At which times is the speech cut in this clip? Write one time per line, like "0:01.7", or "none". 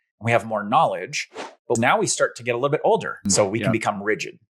0:01.8
0:03.3